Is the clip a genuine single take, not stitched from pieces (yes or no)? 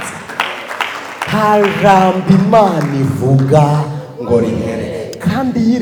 yes